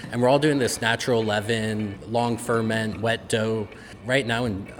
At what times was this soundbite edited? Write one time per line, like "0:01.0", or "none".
0:02.0
0:03.9